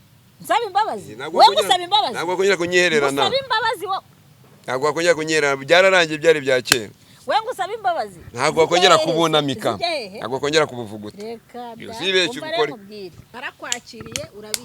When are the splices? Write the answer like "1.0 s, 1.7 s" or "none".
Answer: 13.2 s